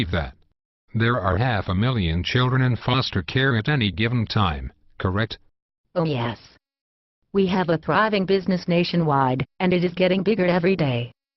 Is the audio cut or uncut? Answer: cut